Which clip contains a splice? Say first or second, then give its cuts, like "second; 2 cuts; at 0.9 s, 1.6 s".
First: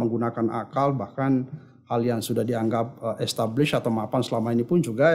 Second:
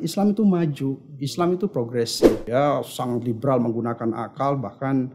second; 1 cut; at 2.4 s